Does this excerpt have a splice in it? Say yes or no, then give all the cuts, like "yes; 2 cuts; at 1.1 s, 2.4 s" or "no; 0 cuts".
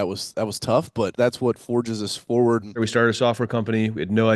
yes; 2 cuts; at 1.1 s, 2.9 s